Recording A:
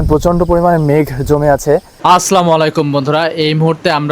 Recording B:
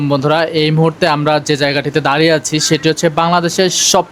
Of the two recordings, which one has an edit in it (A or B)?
A